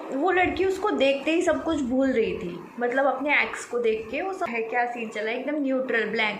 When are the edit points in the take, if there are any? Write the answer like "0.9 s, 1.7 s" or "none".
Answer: 4.5 s